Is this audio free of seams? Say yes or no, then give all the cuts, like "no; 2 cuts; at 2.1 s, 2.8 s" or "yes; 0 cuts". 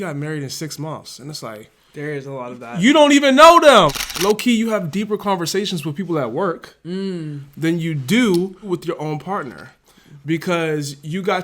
no; 2 cuts; at 3.9 s, 8.6 s